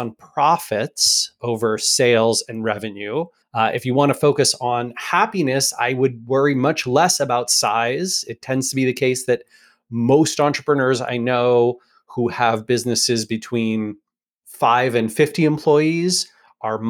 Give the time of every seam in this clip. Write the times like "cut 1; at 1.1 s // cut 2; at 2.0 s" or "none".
cut 1; at 3.4 s

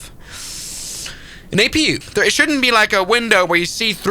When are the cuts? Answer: cut 1; at 2.0 s

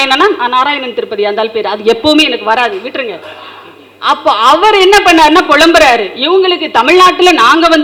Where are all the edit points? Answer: none

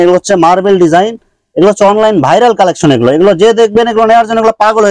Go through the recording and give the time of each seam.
none

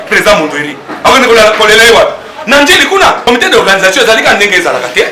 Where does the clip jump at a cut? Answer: cut 1; at 3.3 s

